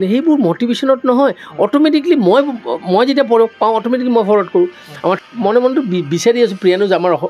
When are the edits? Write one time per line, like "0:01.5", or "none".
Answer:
0:05.2